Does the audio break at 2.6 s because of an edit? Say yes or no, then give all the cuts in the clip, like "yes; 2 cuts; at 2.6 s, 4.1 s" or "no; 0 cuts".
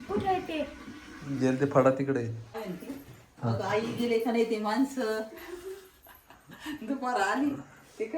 yes; 1 cut; at 2.6 s